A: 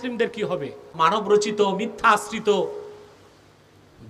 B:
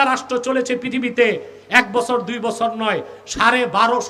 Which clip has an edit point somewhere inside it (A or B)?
A